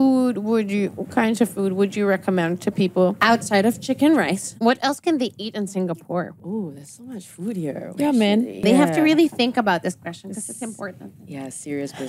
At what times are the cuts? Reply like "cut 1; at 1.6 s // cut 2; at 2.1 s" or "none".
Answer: cut 1; at 3.2 s // cut 2; at 4.4 s // cut 3; at 6.4 s // cut 4; at 8.6 s